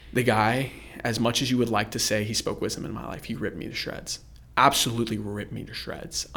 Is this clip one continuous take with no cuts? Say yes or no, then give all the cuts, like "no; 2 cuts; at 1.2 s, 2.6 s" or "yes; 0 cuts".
yes; 0 cuts